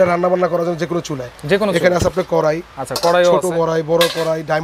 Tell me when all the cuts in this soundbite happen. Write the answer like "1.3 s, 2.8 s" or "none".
none